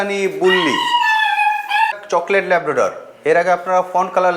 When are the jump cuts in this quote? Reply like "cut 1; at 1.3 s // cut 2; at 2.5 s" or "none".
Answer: cut 1; at 1.9 s